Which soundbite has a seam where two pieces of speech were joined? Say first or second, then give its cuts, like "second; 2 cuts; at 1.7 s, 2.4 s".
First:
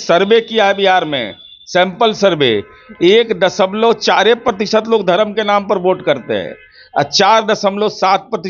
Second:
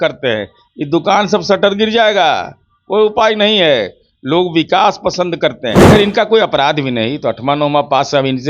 second; 1 cut; at 5.8 s